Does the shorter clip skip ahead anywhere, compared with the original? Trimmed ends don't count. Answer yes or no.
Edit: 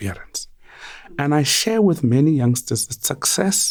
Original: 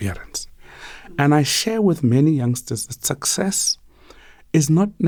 no